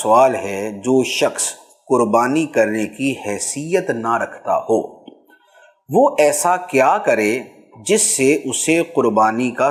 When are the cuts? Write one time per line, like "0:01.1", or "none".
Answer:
none